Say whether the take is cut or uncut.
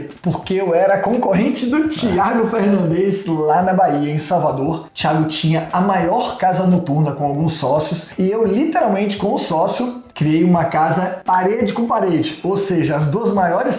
uncut